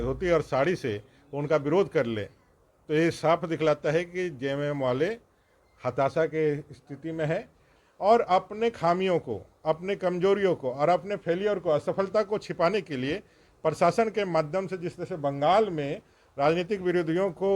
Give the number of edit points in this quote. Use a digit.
1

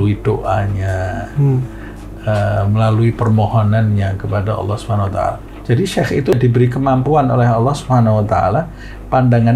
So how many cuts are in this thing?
2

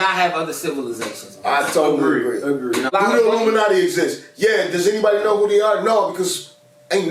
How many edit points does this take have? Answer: 1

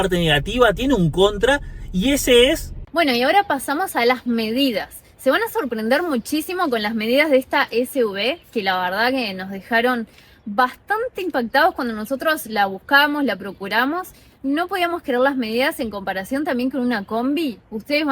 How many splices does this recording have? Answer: 1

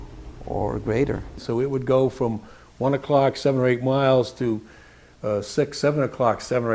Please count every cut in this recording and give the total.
1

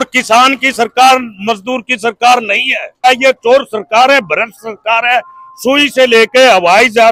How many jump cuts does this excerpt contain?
1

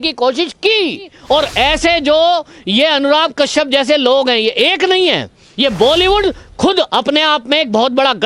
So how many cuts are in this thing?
2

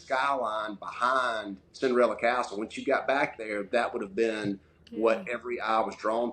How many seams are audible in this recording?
0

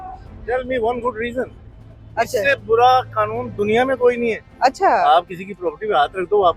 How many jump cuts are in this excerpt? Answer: 0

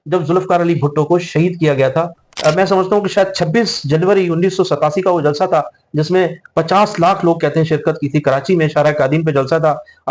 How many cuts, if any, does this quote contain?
1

